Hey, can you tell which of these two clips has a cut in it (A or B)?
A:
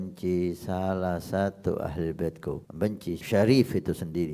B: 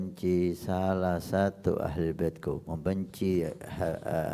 A